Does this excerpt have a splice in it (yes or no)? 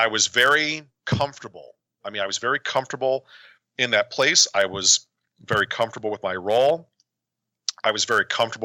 yes